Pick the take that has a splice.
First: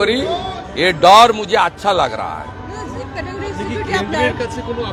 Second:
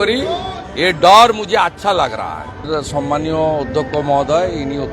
second; 1 cut; at 2.6 s

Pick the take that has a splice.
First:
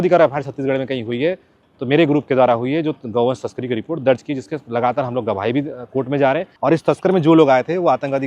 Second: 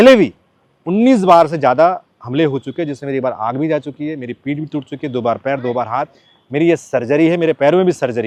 first; 1 cut; at 6.5 s

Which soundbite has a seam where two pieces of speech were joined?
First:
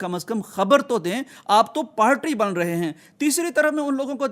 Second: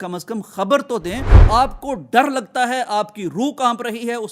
second; 1 cut; at 1.3 s

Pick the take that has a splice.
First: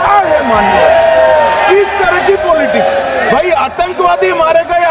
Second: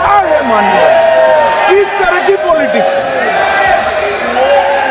first; 1 cut; at 3.3 s

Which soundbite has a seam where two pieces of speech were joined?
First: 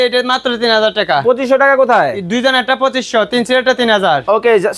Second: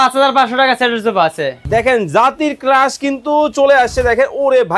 second; 1 cut; at 1.6 s

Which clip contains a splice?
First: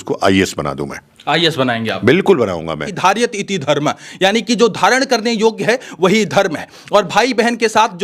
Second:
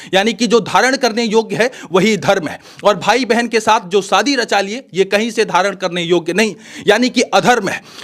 first; 1 cut; at 3.0 s

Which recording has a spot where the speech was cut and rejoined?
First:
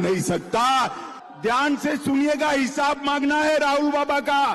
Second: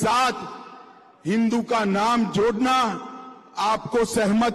first; 1 cut; at 1.1 s

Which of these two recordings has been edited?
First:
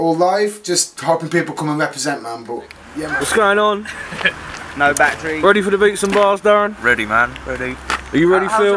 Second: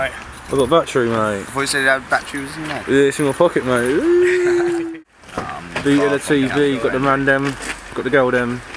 first; 1 cut; at 1.1 s

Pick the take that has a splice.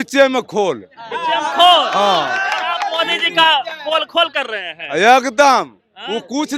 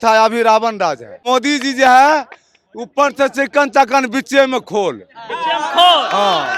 second; 1 cut; at 1.2 s

